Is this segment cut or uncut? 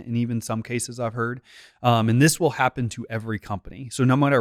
uncut